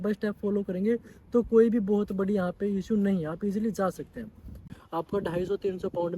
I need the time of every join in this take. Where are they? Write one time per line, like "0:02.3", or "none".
0:04.7